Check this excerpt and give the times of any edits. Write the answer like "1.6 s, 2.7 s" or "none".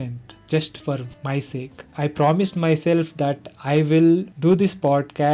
1.9 s